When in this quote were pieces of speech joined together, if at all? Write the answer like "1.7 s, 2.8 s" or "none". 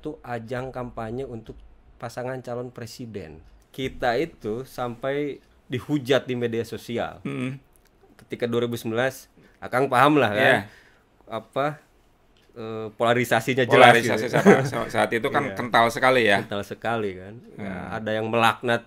3.6 s